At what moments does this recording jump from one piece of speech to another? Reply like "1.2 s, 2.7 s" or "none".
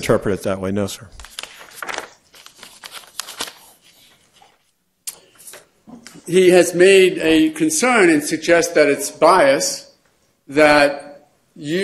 8.1 s